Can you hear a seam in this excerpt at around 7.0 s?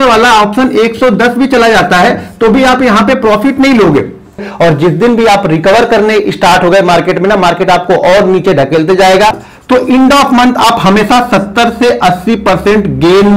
no; 2 cuts; at 4.5 s, 9.5 s

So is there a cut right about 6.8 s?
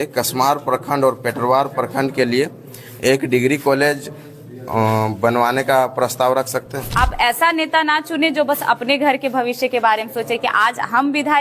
yes; 1 cut; at 6.8 s

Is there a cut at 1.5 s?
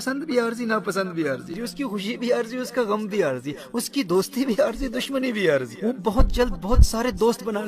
yes; 2 cuts; at 1.5 s, 5.7 s

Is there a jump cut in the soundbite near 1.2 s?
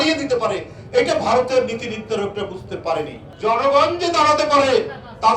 no; 1 cut; at 3.2 s

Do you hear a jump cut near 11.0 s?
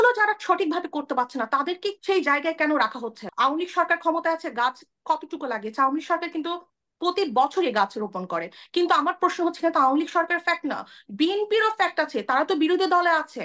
no; 2 cuts; at 2.0 s, 3.2 s

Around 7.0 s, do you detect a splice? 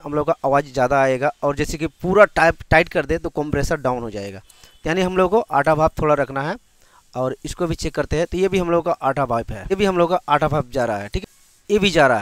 no; 2 cuts; at 9.7 s, 11.1 s

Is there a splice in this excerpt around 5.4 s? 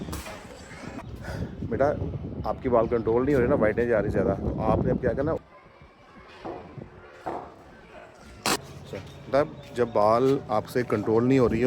yes; 1 cut; at 5.4 s

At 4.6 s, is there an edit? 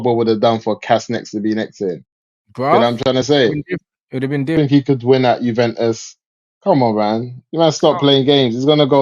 yes; 1 cut; at 4.6 s

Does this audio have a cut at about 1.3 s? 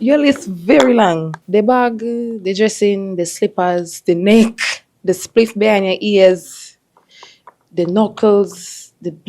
yes; 1 cut; at 1.3 s

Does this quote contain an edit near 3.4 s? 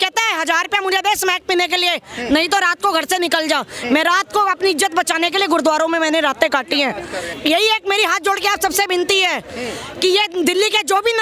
no; 1 cut; at 7.3 s

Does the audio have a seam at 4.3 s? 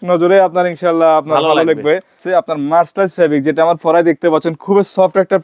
no; 1 cut; at 2.2 s

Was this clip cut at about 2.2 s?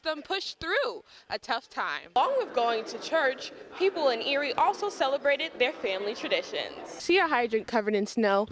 yes; 2 cuts; at 2.2 s, 7.0 s

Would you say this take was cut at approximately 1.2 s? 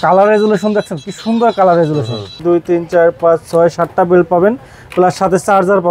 no; 1 cut; at 2.4 s

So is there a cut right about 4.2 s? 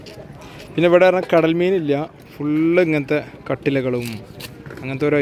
no; 0 cuts

